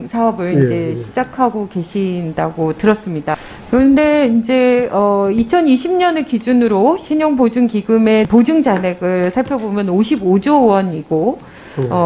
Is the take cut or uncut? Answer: uncut